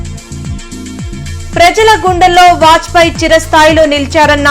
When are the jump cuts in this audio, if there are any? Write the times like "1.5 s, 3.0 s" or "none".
1.3 s